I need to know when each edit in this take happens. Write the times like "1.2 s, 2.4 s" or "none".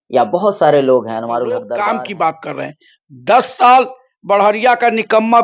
1.6 s